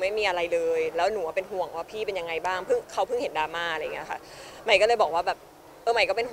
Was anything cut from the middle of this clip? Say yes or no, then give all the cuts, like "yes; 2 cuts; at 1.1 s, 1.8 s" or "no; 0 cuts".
no; 0 cuts